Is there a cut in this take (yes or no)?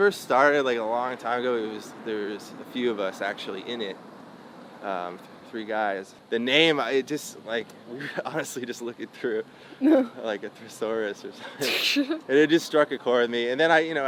no